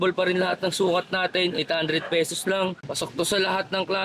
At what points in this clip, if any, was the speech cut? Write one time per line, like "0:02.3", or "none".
none